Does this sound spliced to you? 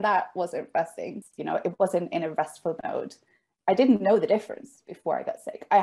yes; 1 cut; at 1.2 s

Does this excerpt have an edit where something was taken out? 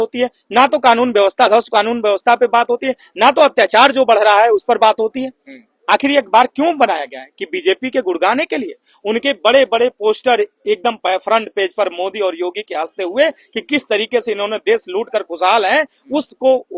no; 0 cuts

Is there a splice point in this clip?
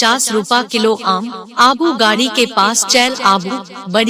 yes; 1 cut; at 1.0 s

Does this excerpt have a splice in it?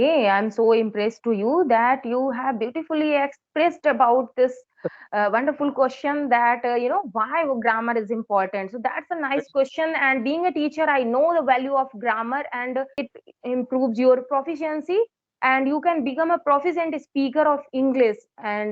yes; 1 cut; at 13.1 s

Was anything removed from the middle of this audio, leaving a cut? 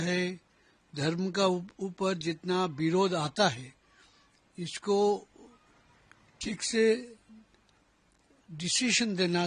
no; 0 cuts

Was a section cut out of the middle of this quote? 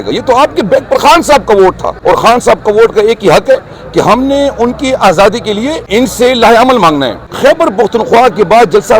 yes; 3 cuts; at 1.9 s, 5.8 s, 7.2 s

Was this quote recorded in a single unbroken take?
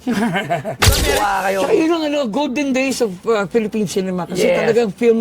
no; 1 cut; at 1.0 s

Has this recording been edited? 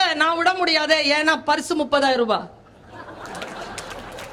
no; 0 cuts

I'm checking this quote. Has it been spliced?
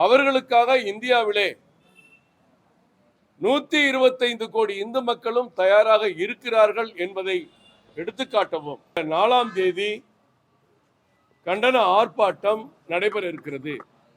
yes; 1 cut; at 9.0 s

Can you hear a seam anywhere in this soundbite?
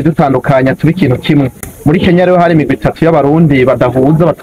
no; 0 cuts

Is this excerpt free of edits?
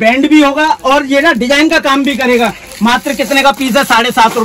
yes; 0 cuts

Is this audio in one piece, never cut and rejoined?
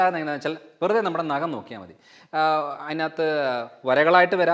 yes; 0 cuts

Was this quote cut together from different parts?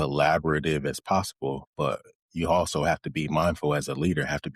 yes; 1 cut; at 1.7 s

